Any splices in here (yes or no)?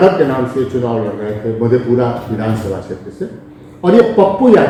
no